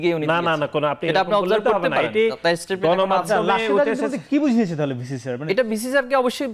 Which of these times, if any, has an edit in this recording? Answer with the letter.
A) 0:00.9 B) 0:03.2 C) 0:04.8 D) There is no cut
D